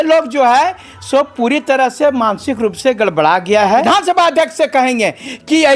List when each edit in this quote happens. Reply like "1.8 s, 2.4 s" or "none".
3.8 s